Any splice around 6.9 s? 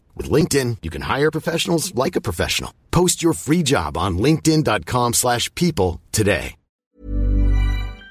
yes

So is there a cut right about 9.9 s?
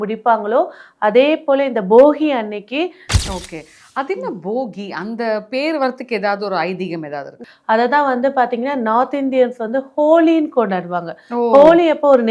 no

